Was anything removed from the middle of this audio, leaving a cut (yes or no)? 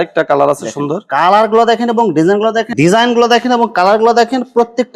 yes